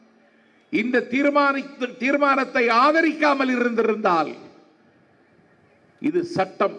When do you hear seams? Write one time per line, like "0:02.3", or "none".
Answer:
none